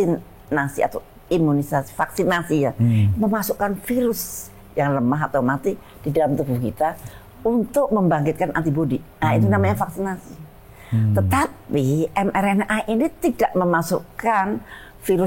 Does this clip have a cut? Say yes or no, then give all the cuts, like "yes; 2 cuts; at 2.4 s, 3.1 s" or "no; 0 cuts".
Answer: no; 0 cuts